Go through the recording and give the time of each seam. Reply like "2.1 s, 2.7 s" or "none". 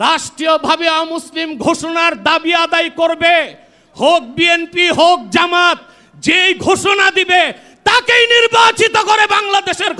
none